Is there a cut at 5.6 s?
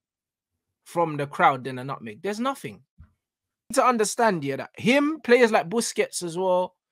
no; 1 cut; at 3.7 s

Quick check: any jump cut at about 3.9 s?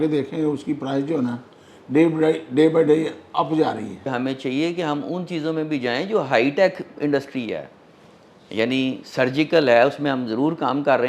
yes; 1 cut; at 3.9 s

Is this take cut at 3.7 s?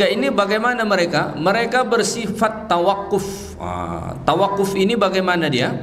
no; 0 cuts

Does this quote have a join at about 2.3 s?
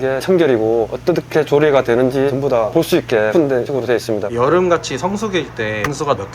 yes; 3 cuts; at 0.9 s, 2.3 s, 4.3 s

